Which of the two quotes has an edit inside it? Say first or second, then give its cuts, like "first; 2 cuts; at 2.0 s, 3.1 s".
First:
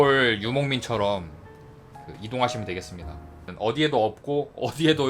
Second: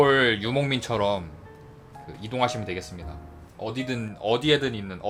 first; 1 cut; at 3.4 s